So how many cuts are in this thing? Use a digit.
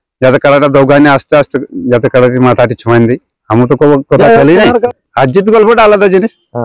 1